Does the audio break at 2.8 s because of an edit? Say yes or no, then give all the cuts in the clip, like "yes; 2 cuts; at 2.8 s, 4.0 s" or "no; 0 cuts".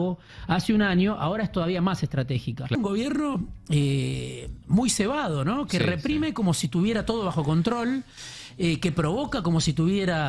yes; 1 cut; at 2.8 s